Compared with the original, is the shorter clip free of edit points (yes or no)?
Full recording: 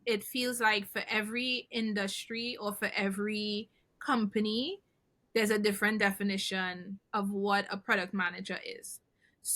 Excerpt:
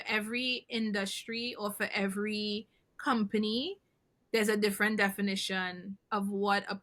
yes